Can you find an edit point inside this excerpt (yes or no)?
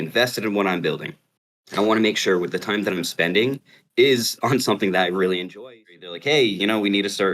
yes